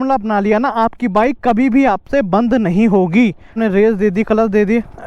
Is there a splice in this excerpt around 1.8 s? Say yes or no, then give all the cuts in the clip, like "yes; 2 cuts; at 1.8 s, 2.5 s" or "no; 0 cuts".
no; 1 cut; at 3.5 s